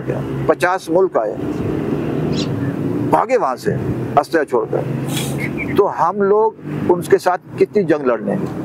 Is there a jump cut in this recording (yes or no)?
no